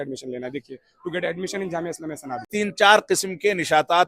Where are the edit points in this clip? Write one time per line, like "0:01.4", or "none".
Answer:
0:02.5